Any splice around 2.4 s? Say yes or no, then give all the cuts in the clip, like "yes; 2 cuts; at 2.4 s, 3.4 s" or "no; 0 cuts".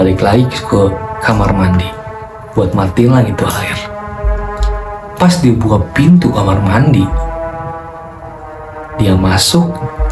no; 0 cuts